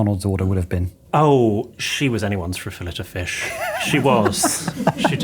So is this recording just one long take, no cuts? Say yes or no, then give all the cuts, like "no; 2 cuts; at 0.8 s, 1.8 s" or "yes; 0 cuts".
no; 1 cut; at 0.9 s